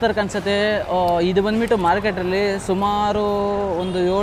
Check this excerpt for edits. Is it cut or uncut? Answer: uncut